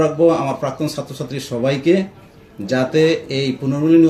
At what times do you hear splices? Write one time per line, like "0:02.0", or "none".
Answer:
none